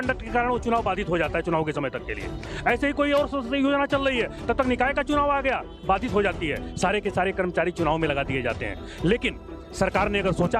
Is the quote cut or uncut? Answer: uncut